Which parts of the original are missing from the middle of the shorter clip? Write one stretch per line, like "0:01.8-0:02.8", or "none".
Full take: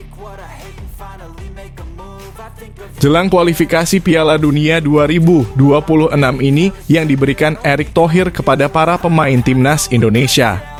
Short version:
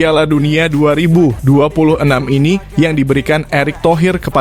none